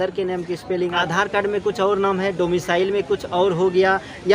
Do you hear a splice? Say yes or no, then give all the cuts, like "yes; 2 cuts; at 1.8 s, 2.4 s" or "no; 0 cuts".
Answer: yes; 1 cut; at 1.0 s